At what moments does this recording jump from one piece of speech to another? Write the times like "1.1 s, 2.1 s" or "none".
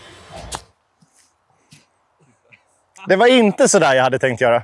none